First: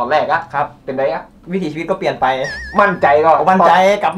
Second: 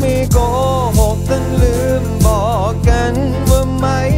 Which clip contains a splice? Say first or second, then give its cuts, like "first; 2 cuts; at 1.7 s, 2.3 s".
first; 1 cut; at 1.4 s